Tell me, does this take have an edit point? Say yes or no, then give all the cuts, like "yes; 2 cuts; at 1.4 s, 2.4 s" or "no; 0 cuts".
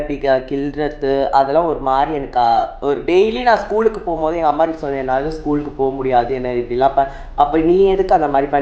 no; 0 cuts